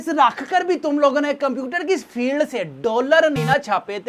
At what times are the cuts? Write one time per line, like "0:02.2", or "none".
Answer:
none